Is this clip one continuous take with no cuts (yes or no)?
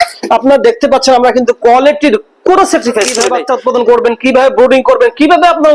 no